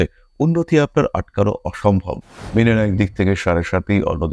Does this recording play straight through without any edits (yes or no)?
no